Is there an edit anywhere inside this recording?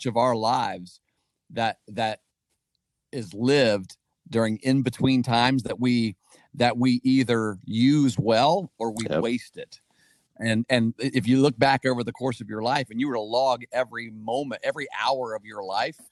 no; 0 cuts

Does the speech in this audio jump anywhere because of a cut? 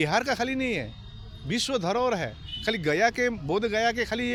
no; 0 cuts

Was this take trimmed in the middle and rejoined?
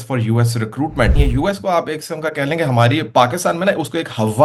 yes; 1 cut; at 1.2 s

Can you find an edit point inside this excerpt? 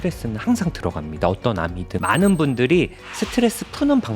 yes; 1 cut; at 1.9 s

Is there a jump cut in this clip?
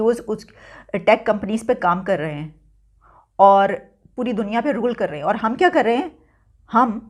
no; 0 cuts

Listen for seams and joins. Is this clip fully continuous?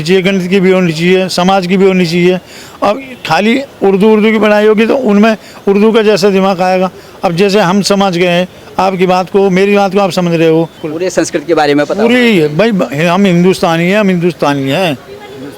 yes; 0 cuts

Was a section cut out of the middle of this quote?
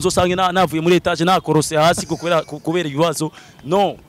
no; 0 cuts

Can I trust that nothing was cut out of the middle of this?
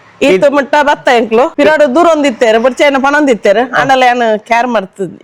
no; 1 cut; at 1.5 s

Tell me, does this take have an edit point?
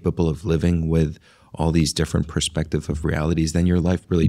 no; 0 cuts

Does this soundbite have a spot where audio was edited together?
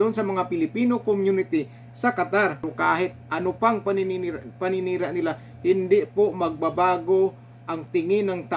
yes; 1 cut; at 2.6 s

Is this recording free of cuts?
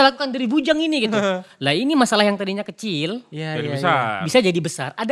yes; 0 cuts

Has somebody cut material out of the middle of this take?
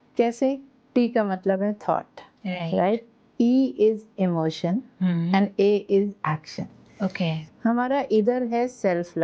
yes; 2 cuts; at 3.2 s, 7.5 s

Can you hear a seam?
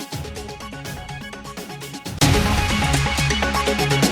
no; 0 cuts

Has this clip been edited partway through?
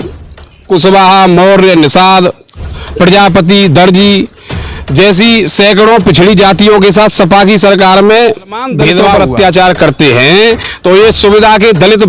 yes; 1 cut; at 9.0 s

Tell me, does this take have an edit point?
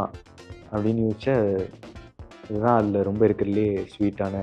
no; 0 cuts

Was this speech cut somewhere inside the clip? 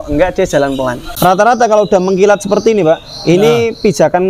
yes; 1 cut; at 1.0 s

